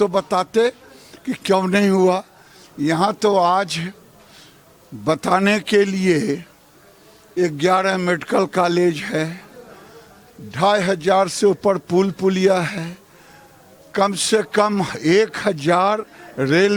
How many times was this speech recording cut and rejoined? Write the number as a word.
zero